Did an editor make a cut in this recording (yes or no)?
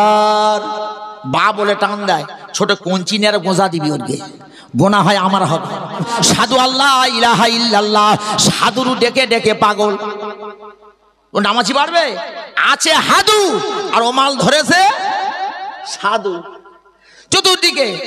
yes